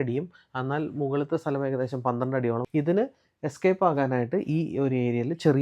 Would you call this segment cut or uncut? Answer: cut